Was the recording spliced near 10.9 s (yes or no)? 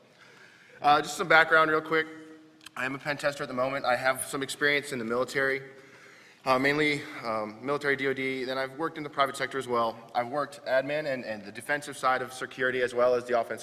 yes